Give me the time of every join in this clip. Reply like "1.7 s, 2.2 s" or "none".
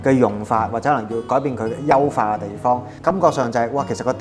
2.9 s